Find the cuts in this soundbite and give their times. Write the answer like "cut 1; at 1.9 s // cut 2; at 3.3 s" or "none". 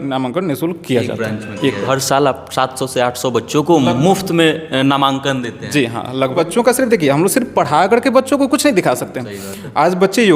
cut 1; at 1.8 s // cut 2; at 6.3 s

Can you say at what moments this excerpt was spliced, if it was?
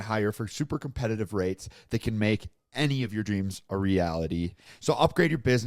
cut 1; at 4.6 s

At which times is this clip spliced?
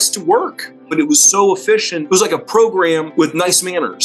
cut 1; at 0.9 s // cut 2; at 1.9 s // cut 3; at 3.1 s

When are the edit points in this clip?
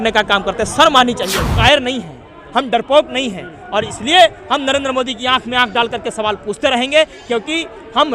cut 1; at 1.5 s

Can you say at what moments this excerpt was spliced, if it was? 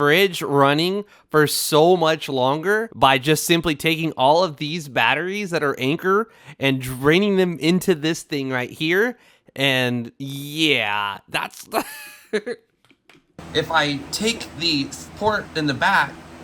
cut 1; at 2.9 s // cut 2; at 13.3 s

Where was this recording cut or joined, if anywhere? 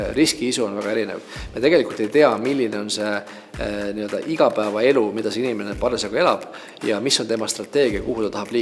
none

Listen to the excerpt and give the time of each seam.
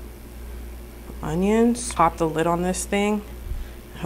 cut 1; at 1.9 s

